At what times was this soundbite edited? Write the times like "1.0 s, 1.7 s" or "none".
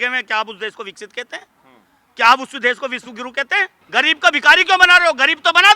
3.8 s